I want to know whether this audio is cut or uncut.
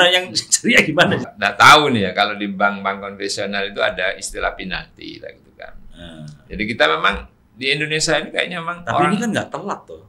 cut